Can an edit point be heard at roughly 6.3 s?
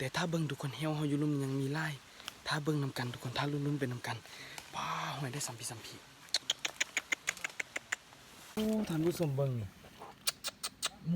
no; 1 cut; at 8.5 s

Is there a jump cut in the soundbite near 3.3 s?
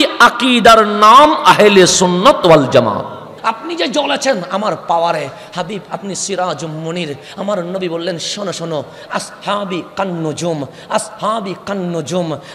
yes; 1 cut; at 3.3 s

